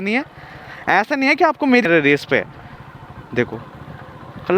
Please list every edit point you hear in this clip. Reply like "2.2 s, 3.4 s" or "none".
1.8 s